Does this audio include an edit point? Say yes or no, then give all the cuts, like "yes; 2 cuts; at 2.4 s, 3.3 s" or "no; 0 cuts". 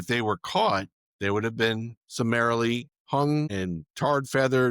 yes; 4 cuts; at 1.0 s, 2.0 s, 2.9 s, 3.5 s